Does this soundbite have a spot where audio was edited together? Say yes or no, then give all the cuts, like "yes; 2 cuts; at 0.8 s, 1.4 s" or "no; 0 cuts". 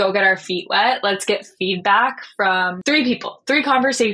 yes; 1 cut; at 2.7 s